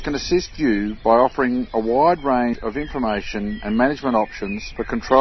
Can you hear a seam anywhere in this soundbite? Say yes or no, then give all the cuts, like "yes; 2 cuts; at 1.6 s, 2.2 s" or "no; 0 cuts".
yes; 1 cut; at 2.6 s